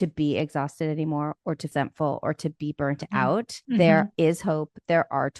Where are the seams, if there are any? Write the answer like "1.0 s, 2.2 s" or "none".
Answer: 1.7 s, 3.6 s, 4.1 s